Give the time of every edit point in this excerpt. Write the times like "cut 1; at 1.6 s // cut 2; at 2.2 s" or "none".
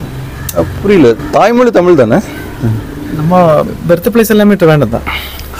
none